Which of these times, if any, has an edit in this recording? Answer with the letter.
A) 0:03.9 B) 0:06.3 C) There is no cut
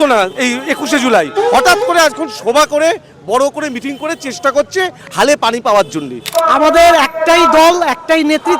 B